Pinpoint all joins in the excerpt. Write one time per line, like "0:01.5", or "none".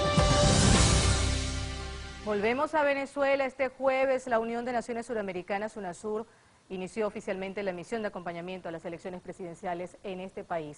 0:05.1